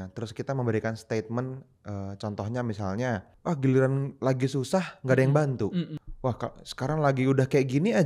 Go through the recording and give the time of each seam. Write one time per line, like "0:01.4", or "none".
0:03.3
0:06.0

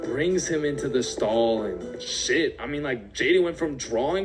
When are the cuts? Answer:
none

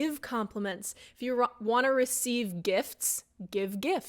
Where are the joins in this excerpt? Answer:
none

